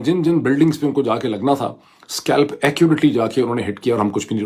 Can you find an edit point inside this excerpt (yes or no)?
no